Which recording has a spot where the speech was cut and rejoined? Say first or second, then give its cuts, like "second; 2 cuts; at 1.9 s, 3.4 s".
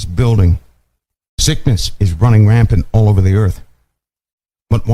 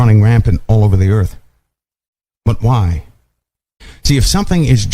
second; 1 cut; at 3.8 s